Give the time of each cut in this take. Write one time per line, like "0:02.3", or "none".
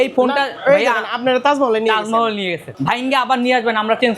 0:02.7